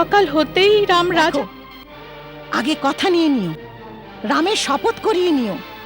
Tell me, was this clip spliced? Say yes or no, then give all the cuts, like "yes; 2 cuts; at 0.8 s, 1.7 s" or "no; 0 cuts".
yes; 1 cut; at 1.3 s